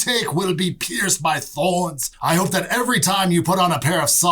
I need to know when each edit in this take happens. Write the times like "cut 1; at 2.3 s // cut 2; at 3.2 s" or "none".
cut 1; at 2.1 s

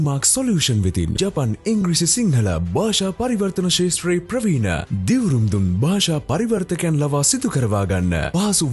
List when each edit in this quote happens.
cut 1; at 1.1 s

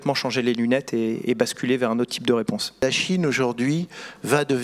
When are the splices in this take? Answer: cut 1; at 2.8 s

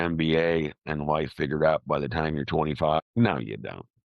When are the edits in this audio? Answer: cut 1; at 3.0 s

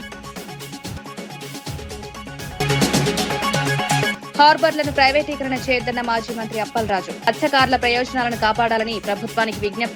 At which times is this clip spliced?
none

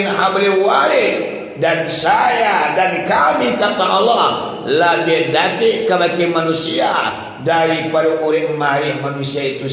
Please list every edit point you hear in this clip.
none

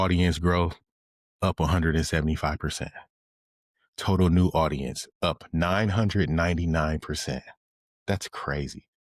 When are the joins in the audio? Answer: none

